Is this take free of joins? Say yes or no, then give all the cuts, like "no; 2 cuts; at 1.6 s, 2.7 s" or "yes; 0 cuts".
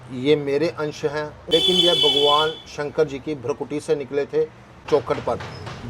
no; 2 cuts; at 1.4 s, 4.8 s